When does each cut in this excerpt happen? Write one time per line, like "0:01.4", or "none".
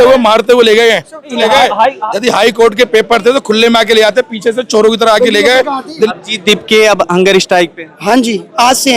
0:01.4
0:06.1